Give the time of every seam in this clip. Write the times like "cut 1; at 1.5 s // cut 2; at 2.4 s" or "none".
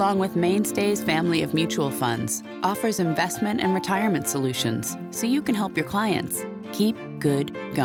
none